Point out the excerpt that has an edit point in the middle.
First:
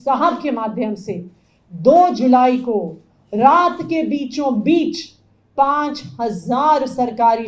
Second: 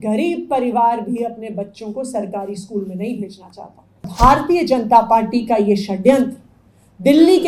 second; 1 cut; at 4.1 s

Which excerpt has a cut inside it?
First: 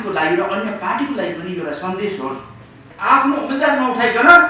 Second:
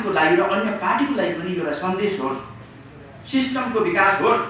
first; 1 cut; at 2.9 s

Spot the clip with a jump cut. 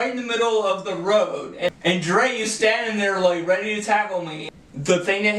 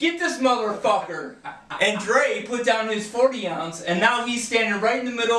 first; 2 cuts; at 1.7 s, 4.4 s

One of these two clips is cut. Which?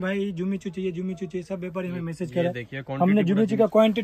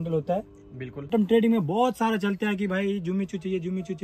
second; 1 cut; at 1.1 s

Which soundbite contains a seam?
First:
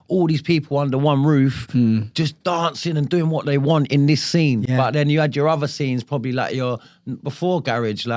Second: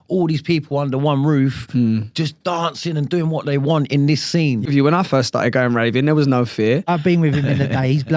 second; 2 cuts; at 4.7 s, 6.9 s

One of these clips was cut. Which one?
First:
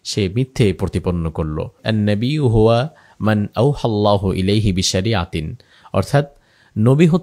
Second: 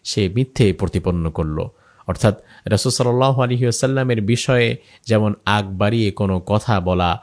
first; 1 cut; at 1.8 s

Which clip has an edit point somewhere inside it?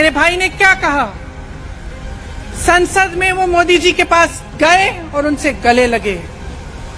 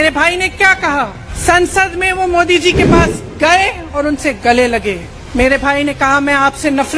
second; 2 cuts; at 1.2 s, 5.1 s

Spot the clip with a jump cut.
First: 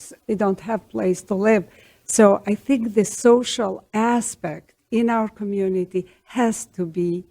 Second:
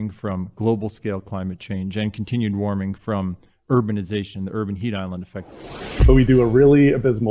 second; 1 cut; at 5.8 s

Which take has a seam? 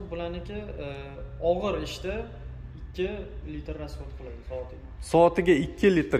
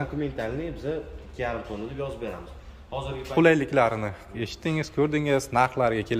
second; 1 cut; at 3.3 s

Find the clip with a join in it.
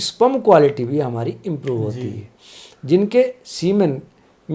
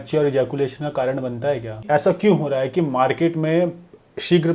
second; 1 cut; at 1.8 s

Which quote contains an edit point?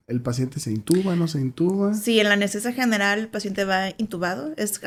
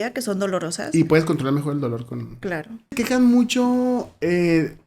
second; 1 cut; at 2.9 s

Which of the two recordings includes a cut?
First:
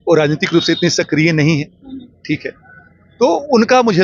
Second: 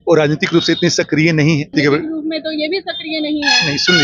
second; 1 cut; at 1.7 s

